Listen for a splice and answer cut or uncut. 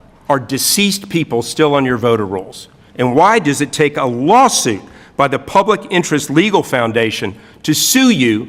uncut